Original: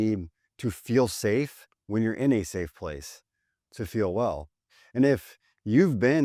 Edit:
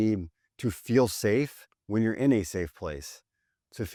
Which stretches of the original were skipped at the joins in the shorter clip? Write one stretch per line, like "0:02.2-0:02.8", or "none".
none